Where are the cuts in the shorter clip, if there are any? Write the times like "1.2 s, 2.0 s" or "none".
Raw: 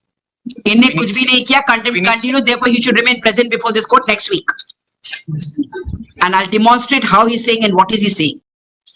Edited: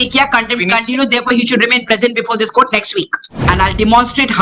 3.3 s

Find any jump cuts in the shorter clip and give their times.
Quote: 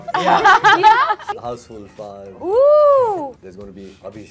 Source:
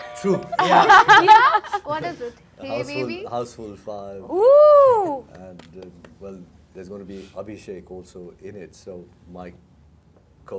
1.3 s, 3.4 s

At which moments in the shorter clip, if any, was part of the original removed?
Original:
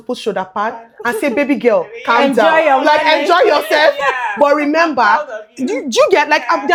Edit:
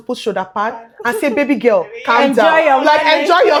none

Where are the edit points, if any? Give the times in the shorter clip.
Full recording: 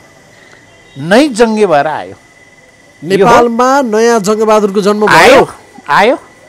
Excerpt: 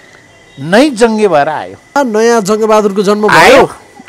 1.9 s

